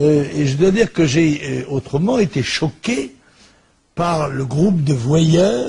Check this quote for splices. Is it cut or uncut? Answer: uncut